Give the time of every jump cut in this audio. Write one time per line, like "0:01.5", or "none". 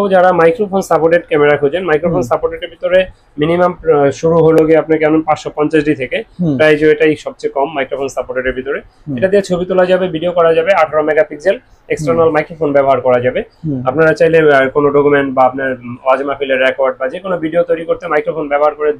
none